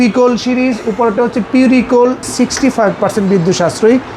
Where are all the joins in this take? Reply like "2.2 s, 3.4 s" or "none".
2.3 s

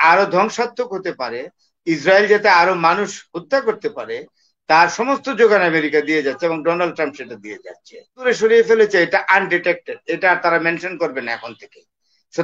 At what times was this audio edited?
8.2 s

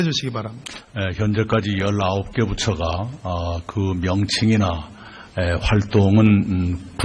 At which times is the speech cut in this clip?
4.0 s

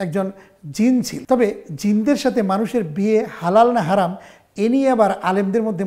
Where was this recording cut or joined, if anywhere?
1.2 s

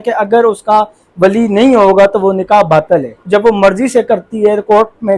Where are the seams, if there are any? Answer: 3.2 s

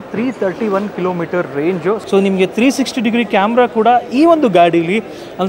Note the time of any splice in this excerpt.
2.0 s

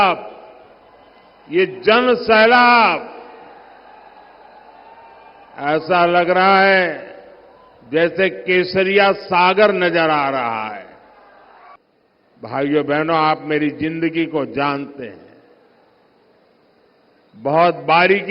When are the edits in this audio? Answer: 11.7 s

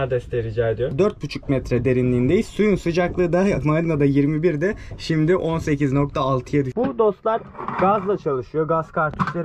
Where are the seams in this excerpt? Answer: 0.9 s, 6.7 s

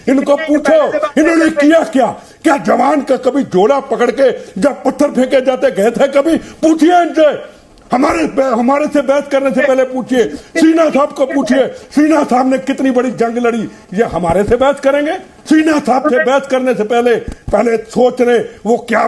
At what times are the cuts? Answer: 15.3 s

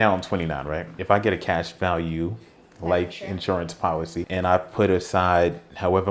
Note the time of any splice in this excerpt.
0.9 s, 4.3 s

